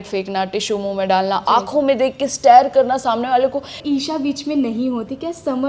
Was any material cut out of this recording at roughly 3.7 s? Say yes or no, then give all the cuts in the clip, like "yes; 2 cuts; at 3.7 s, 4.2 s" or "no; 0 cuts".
yes; 1 cut; at 3.7 s